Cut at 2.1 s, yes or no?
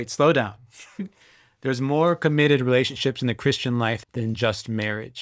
no